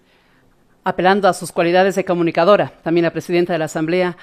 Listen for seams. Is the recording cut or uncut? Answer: uncut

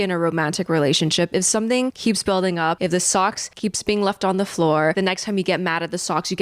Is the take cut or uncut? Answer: cut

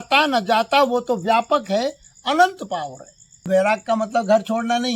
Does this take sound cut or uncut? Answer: cut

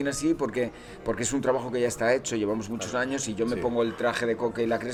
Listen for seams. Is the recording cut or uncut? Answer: uncut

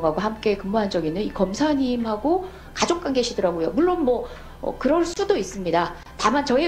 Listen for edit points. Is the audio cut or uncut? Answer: uncut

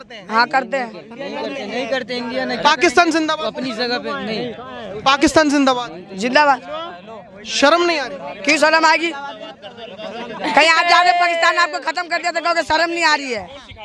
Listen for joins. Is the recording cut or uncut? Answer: uncut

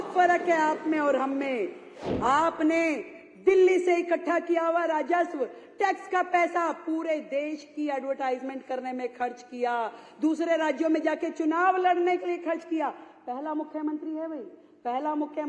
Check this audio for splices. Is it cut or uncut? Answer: uncut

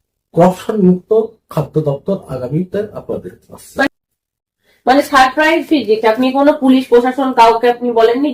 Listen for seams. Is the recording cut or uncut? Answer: cut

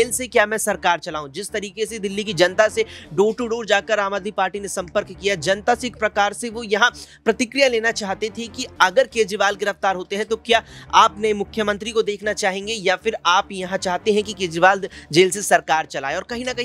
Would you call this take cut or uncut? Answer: uncut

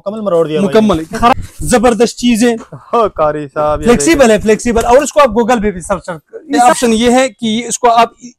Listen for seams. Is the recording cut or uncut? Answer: cut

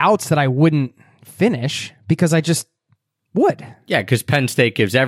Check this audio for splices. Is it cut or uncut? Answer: uncut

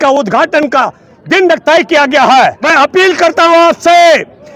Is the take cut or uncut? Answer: cut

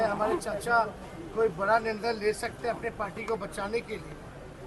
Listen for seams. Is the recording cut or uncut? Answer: uncut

